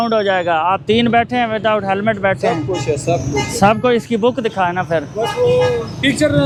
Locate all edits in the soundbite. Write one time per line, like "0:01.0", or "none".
none